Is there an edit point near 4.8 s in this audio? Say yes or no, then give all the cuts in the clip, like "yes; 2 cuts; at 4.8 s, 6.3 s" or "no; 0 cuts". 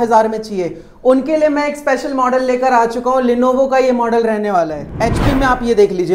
yes; 1 cut; at 4.8 s